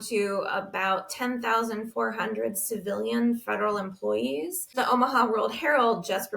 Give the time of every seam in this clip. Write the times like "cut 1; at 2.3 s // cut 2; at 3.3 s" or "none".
cut 1; at 4.7 s